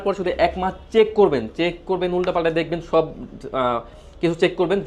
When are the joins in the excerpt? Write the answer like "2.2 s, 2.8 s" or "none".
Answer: none